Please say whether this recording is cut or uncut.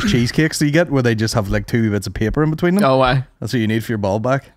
uncut